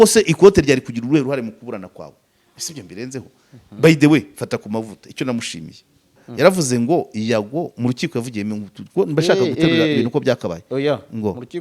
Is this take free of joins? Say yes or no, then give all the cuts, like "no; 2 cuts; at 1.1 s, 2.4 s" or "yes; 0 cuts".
no; 1 cut; at 6.2 s